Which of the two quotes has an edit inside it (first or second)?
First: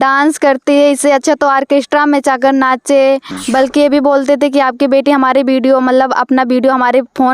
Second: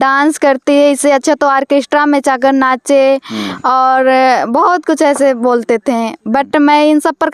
first